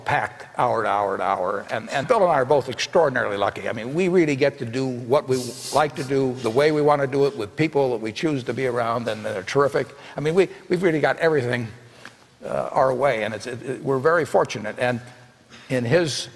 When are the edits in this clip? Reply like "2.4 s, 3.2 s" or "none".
10.9 s